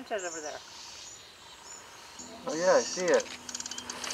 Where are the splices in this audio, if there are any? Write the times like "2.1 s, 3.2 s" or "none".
2.2 s